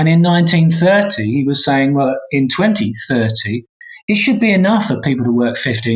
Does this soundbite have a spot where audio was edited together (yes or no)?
no